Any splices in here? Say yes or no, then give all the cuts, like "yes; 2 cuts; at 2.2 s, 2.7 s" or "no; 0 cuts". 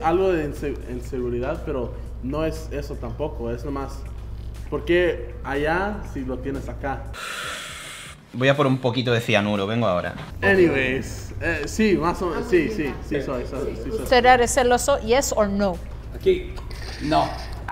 no; 0 cuts